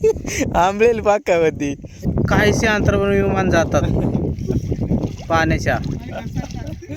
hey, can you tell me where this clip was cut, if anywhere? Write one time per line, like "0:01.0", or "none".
0:02.0